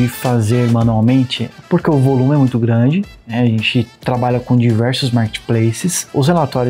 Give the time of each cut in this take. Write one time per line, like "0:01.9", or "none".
none